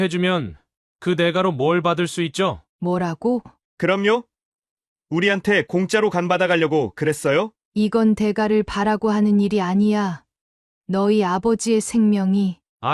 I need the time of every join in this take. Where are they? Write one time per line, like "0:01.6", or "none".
0:02.7
0:03.6
0:07.6